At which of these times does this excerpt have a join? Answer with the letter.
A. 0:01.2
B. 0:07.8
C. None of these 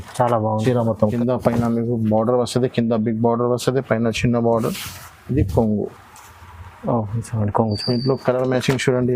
A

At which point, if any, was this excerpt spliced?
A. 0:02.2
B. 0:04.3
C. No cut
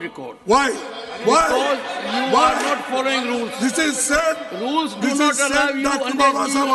C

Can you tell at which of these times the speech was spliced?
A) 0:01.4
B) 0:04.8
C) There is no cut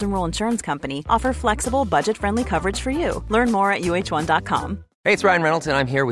B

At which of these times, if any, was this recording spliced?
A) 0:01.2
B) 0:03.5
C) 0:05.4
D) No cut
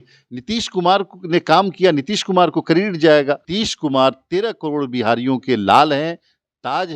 B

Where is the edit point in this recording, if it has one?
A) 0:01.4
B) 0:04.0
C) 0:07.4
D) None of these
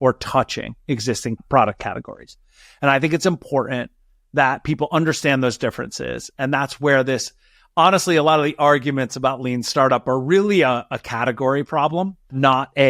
A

